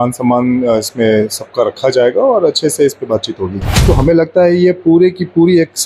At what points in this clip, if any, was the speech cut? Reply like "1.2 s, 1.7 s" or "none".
3.7 s